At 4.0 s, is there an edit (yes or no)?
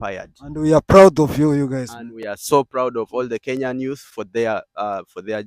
no